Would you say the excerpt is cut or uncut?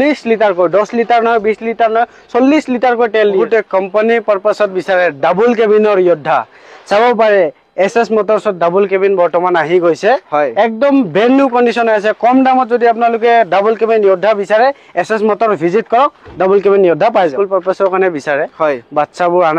cut